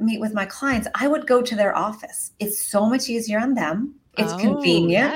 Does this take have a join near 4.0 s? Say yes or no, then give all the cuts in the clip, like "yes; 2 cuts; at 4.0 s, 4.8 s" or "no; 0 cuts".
yes; 1 cut; at 4.0 s